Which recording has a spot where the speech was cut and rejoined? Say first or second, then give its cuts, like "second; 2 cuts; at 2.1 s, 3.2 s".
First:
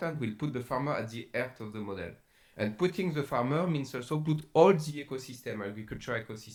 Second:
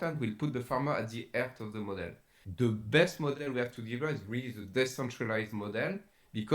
second; 1 cut; at 2.4 s